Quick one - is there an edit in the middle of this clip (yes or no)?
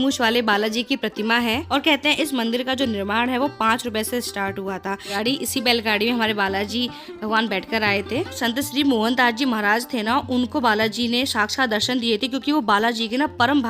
yes